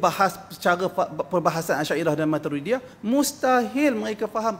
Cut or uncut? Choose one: cut